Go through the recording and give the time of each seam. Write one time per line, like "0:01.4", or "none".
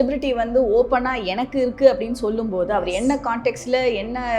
none